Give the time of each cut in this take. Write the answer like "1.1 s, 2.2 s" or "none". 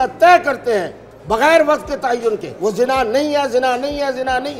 2.5 s

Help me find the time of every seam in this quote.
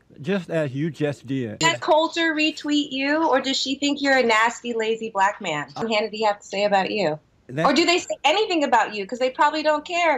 1.5 s, 5.8 s

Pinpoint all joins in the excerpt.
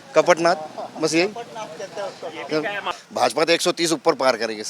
2.9 s

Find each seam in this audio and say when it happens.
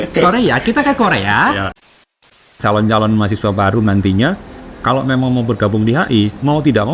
2.2 s

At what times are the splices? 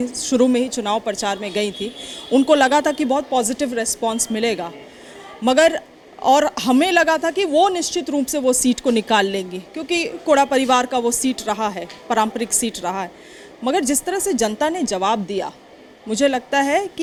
none

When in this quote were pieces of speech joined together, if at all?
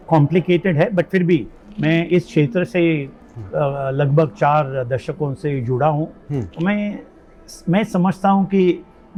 none

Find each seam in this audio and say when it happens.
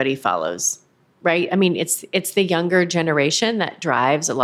none

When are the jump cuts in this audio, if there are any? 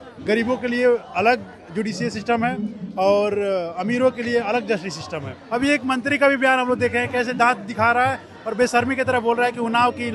5.4 s

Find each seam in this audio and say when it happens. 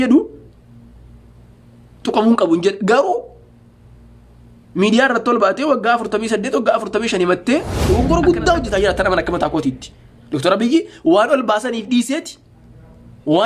7.7 s

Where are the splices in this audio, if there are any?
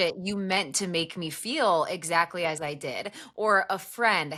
none

